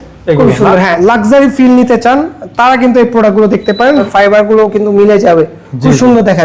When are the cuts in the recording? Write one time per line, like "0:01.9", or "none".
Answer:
0:00.9
0:04.0